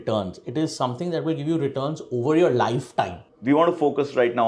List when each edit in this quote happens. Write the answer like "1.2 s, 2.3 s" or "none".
3.2 s

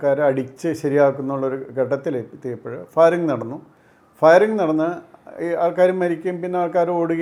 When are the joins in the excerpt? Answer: none

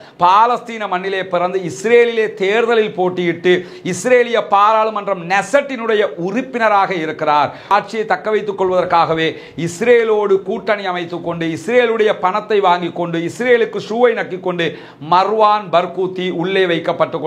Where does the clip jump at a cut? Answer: 7.7 s

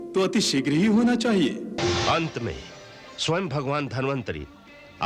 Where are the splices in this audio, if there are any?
1.8 s

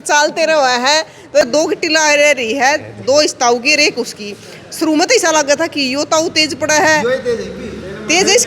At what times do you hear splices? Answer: 1.4 s

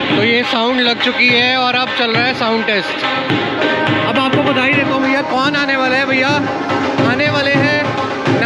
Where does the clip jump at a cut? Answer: none

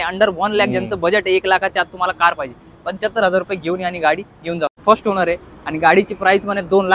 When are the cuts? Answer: 4.8 s

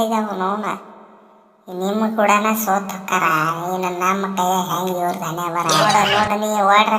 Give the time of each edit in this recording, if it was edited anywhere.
5.9 s

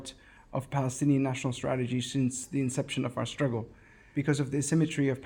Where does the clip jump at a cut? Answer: 4.1 s

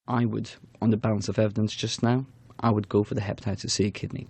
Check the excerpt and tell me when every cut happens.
1.0 s

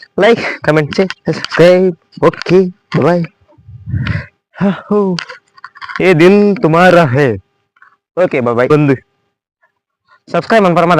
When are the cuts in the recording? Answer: 8.7 s

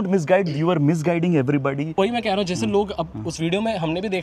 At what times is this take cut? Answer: 1.9 s

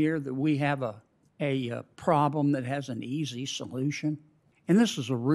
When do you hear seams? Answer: none

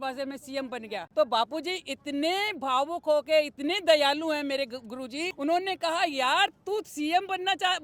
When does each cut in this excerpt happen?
1.1 s, 5.3 s

